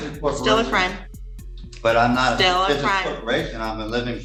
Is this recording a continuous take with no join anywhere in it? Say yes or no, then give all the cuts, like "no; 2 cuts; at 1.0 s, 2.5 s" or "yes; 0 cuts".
yes; 0 cuts